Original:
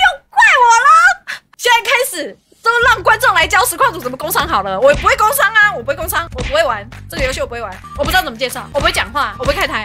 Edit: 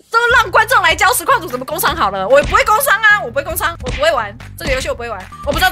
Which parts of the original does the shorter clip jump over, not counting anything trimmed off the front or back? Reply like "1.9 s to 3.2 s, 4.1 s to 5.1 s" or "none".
none